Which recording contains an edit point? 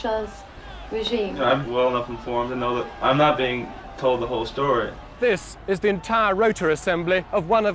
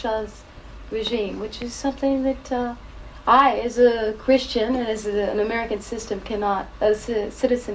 first; 3 cuts; at 1.6 s, 2.9 s, 5.2 s

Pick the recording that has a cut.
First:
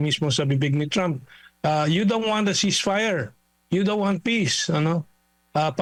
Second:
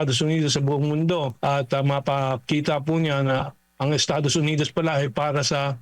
second; 1 cut; at 1.3 s

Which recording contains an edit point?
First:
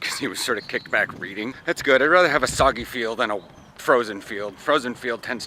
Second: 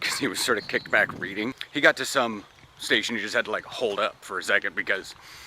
first; 1 cut; at 1.6 s

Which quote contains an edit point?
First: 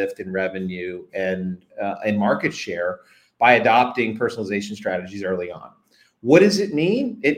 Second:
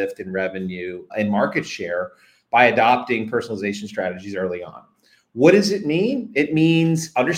second; 1 cut; at 1.1 s

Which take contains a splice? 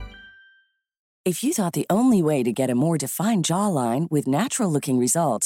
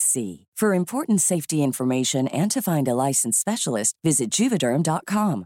first; 1 cut; at 1.0 s

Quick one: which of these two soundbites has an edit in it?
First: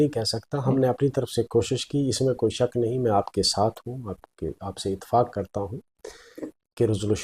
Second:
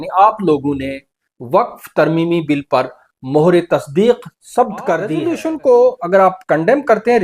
second; 1 cut; at 5.3 s

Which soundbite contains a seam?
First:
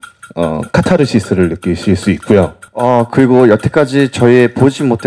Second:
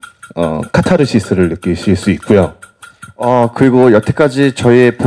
first; 1 cut; at 2.6 s

